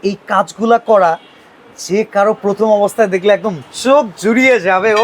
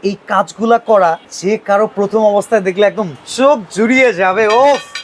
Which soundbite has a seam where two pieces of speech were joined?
second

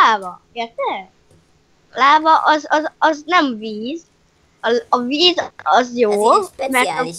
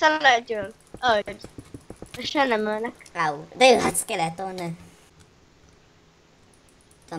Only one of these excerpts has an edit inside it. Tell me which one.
second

